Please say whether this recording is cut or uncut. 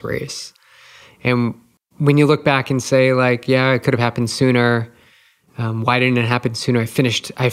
cut